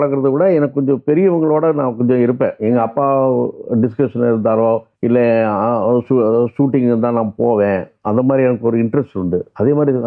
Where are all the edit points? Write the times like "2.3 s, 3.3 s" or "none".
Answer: 4.9 s